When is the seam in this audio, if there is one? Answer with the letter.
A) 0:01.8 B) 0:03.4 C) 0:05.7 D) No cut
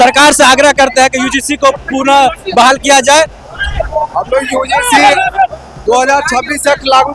B